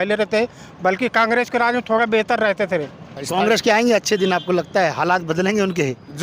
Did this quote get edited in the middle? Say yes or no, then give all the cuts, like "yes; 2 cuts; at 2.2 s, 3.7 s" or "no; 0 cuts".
yes; 1 cut; at 3.3 s